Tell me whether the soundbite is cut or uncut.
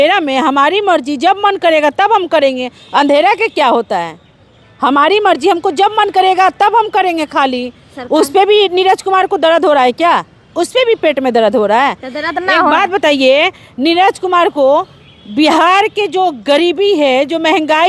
uncut